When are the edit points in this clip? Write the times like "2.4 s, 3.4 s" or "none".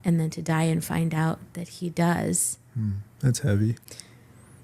3.1 s